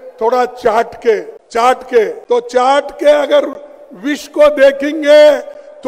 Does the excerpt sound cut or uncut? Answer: cut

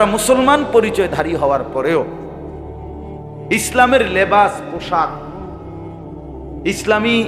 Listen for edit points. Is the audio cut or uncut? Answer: cut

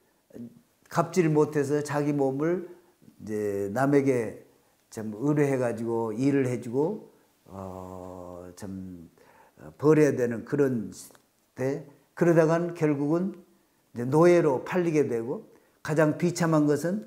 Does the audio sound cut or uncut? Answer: uncut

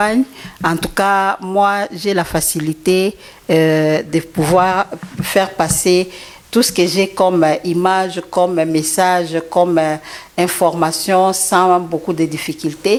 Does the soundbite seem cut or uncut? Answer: uncut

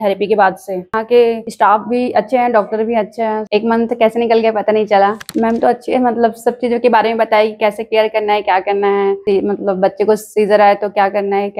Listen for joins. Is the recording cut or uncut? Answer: uncut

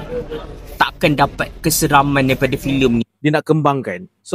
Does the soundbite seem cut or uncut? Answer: cut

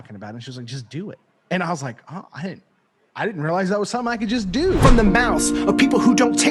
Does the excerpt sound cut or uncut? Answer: cut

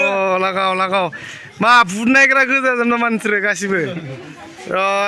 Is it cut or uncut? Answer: uncut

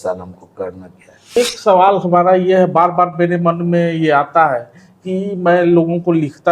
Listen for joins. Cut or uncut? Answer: cut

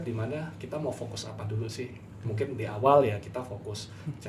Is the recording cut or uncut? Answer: uncut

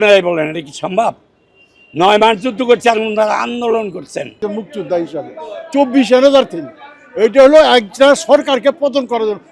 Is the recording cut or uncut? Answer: cut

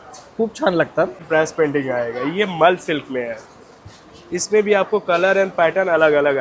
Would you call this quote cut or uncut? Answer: cut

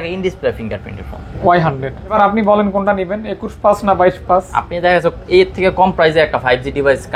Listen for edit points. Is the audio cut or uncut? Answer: cut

